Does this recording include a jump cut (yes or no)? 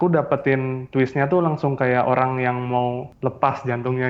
no